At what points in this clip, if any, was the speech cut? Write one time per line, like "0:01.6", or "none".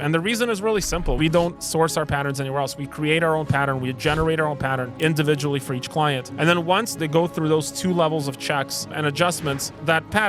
0:01.3
0:04.9
0:06.9